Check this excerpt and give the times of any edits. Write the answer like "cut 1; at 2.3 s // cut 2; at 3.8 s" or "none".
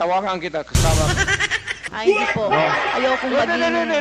cut 1; at 1.1 s // cut 2; at 3.0 s